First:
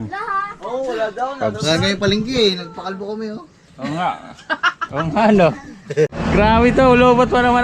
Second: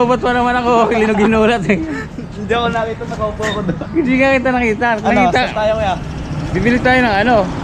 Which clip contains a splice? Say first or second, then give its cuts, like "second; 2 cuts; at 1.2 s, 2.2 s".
first; 1 cut; at 6.2 s